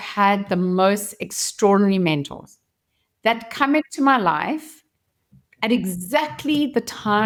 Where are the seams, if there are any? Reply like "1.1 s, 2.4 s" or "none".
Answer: none